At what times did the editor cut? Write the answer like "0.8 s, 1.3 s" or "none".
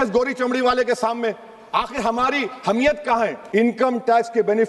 3.4 s